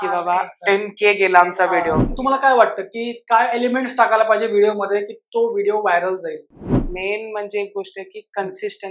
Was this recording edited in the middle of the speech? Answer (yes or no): yes